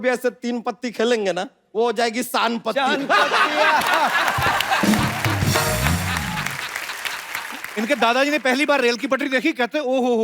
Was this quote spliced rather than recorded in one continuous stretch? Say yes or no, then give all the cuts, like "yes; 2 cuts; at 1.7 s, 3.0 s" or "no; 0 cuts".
yes; 2 cuts; at 1.6 s, 7.6 s